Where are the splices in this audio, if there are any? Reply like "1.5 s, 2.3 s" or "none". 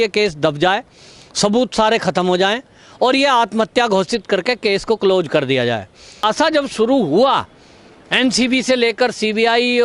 6.2 s